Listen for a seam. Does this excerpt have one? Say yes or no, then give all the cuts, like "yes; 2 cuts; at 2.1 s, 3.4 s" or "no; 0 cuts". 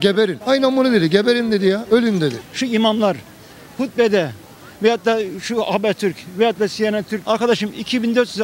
yes; 2 cuts; at 2.4 s, 7.1 s